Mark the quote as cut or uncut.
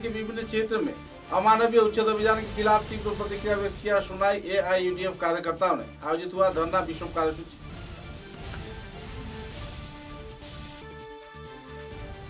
uncut